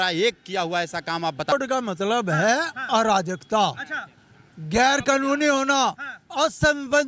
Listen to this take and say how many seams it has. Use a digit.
1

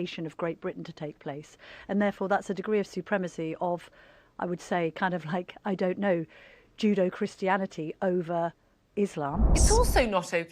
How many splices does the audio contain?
1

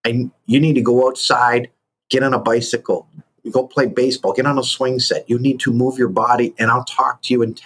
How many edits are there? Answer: 1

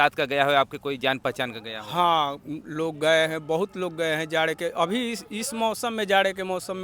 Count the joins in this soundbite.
0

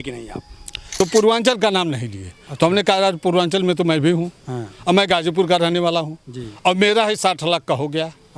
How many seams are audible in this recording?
1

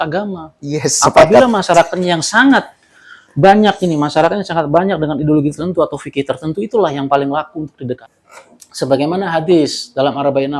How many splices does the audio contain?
1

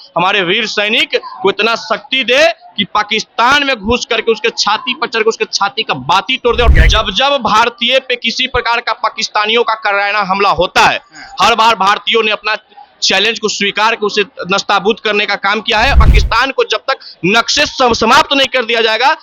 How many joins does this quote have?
2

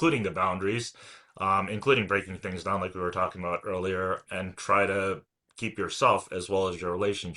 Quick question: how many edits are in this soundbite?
1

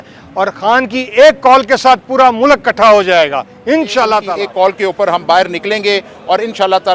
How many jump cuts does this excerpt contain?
1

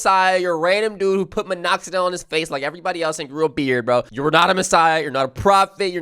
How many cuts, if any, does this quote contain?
1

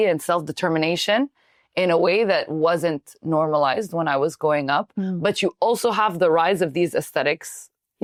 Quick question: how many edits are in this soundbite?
0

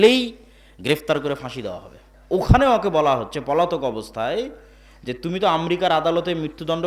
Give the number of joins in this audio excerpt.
1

